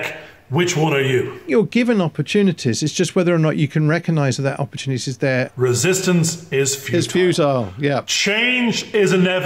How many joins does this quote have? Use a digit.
2